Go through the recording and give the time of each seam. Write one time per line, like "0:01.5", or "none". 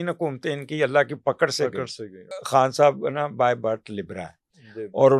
0:02.3